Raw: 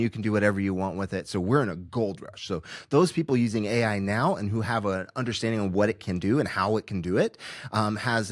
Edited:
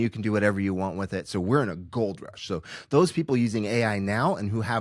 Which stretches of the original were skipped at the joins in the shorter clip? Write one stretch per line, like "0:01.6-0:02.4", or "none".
none